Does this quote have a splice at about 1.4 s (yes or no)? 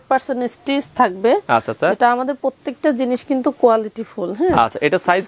no